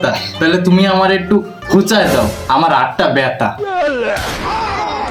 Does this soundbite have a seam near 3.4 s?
no; 0 cuts

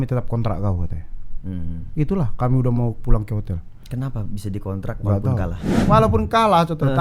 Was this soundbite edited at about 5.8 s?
yes; 1 cut; at 5.8 s

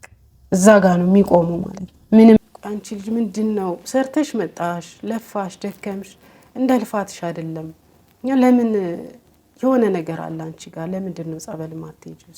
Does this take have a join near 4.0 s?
no; 1 cut; at 2.4 s

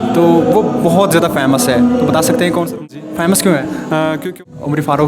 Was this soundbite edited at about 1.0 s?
no; 2 cuts; at 2.8 s, 4.3 s

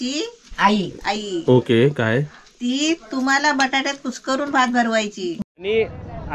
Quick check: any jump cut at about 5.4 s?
yes; 1 cut; at 5.4 s

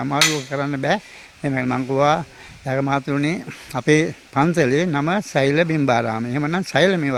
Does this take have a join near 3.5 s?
no; 0 cuts

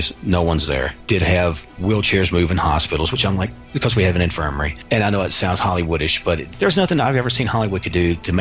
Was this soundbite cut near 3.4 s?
no; 4 cuts; at 1.0 s, 1.7 s, 4.7 s, 6.5 s

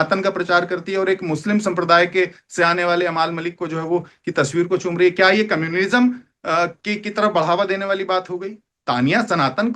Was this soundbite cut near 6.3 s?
no; 0 cuts

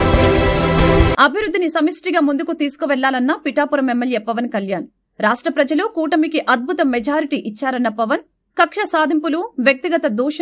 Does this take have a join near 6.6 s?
no; 1 cut; at 1.1 s

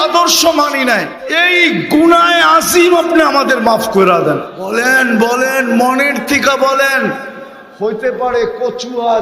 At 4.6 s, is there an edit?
yes; 2 cuts; at 1.2 s, 4.6 s

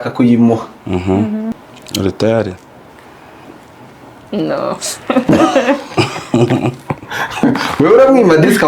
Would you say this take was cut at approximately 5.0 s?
no; 1 cut; at 1.7 s

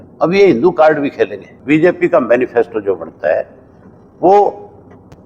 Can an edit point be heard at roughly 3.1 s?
no; 1 cut; at 1.5 s

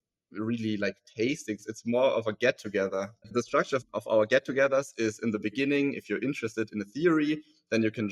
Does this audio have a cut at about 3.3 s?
yes; 1 cut; at 3.3 s

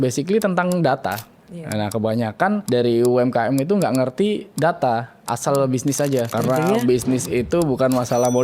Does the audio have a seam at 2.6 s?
yes; 4 cuts; at 1.3 s, 2.6 s, 4.5 s, 6.3 s

